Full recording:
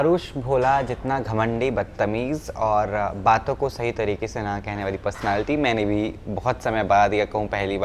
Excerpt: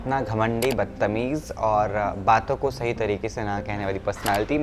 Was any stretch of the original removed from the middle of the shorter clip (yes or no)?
no